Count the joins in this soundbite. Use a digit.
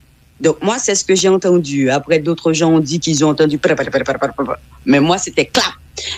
0